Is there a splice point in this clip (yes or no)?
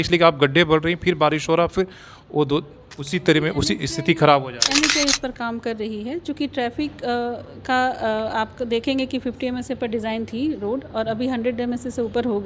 no